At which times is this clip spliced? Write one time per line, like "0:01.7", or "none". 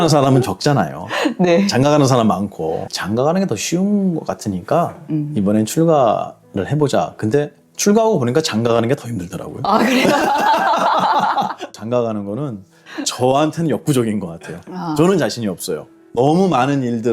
0:02.9
0:11.7